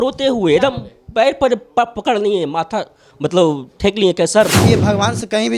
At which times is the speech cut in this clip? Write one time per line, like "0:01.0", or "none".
0:04.6